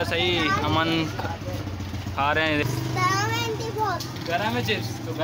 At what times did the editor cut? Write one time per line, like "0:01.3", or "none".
0:02.6
0:04.3